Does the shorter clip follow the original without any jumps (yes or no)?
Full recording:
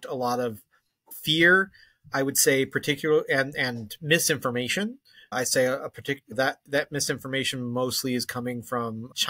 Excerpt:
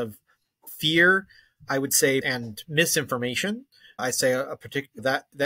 no